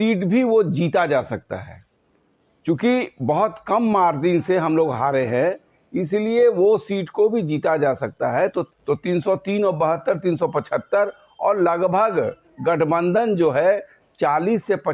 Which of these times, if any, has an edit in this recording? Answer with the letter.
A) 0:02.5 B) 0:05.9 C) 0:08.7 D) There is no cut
C